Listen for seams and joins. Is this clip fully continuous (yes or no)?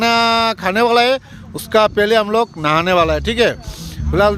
yes